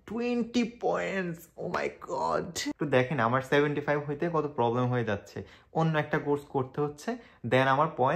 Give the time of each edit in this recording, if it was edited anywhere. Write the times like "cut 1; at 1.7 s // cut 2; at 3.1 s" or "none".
cut 1; at 2.7 s